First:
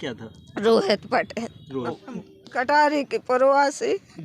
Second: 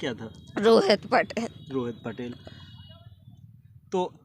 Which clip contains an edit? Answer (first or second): first